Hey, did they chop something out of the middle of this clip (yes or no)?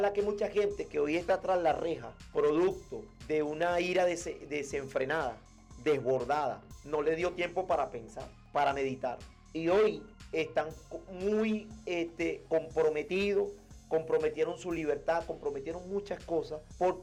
no